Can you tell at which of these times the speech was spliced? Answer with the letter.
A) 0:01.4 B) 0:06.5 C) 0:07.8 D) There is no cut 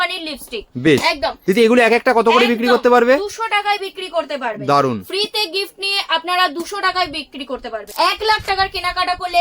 C